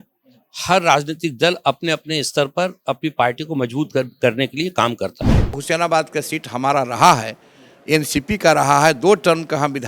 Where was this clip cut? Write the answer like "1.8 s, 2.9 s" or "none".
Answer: 5.5 s